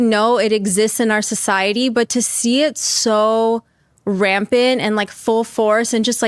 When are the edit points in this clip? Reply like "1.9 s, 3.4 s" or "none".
none